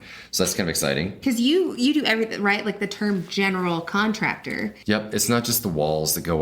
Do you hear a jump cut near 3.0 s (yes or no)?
no